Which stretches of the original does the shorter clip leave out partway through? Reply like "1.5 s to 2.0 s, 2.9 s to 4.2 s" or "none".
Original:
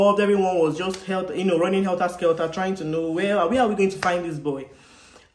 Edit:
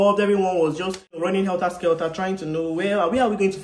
1.2 s to 1.5 s